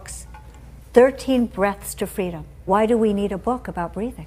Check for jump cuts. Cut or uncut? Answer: uncut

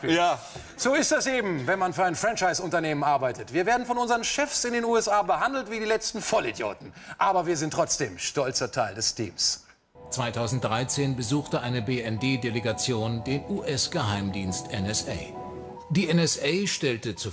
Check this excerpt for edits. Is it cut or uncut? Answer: uncut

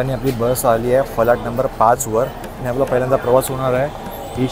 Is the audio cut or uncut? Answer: uncut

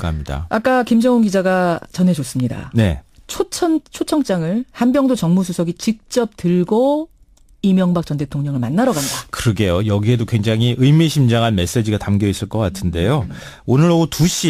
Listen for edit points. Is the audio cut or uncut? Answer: uncut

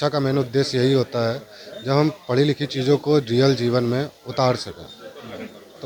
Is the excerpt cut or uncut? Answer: uncut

